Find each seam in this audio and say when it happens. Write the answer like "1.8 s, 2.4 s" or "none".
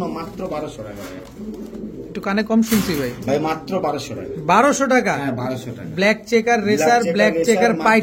none

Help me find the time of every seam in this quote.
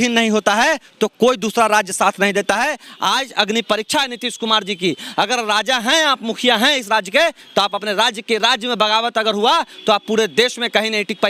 none

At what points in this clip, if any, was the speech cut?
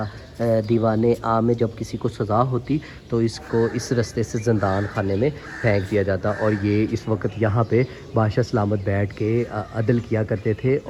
none

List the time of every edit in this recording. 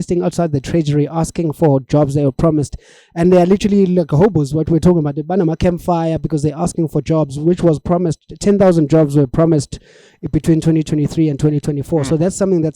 none

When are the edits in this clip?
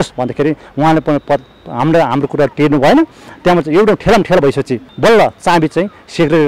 4.9 s

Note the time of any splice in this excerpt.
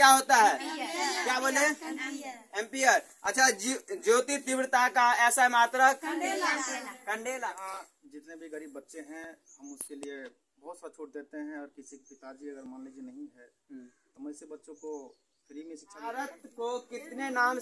7.4 s, 16.1 s

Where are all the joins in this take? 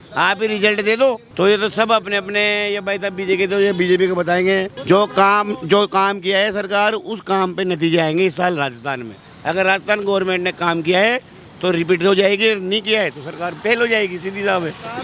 none

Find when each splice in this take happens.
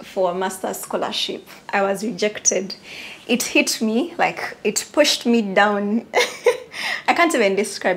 none

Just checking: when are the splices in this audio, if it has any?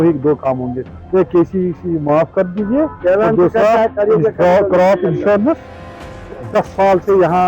6.1 s

